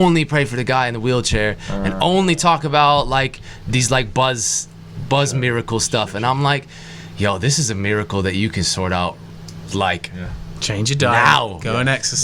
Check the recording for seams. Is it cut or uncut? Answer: uncut